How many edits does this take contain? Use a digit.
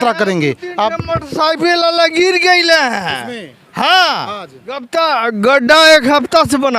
1